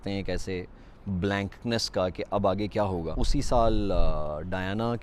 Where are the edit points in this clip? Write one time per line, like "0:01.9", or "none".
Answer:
0:03.2